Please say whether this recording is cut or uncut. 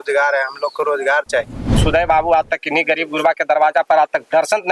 cut